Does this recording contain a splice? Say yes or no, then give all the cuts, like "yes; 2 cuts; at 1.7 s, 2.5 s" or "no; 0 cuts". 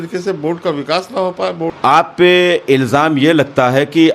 yes; 1 cut; at 1.7 s